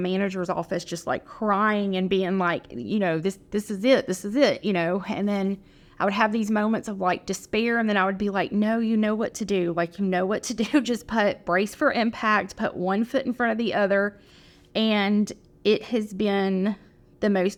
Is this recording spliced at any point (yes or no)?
no